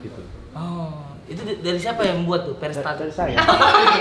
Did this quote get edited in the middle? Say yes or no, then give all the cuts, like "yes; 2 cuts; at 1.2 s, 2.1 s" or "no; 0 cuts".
no; 0 cuts